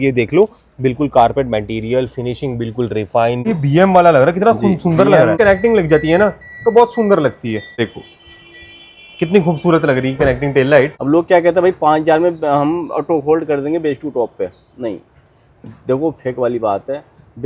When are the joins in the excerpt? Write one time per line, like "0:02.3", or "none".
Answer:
0:03.5
0:05.4
0:07.8
0:11.0